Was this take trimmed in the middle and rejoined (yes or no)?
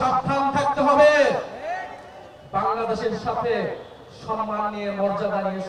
no